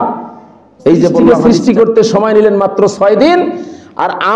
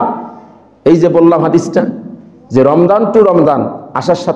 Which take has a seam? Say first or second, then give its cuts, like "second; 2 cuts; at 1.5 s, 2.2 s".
first; 1 cut; at 1.3 s